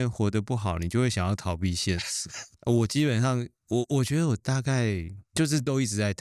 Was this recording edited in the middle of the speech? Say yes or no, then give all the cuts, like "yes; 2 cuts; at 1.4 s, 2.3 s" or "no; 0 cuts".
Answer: yes; 1 cut; at 5.2 s